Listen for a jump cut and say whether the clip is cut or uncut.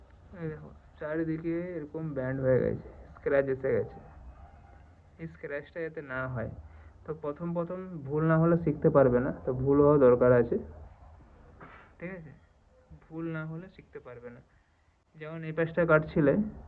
uncut